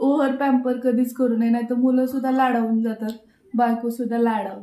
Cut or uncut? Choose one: uncut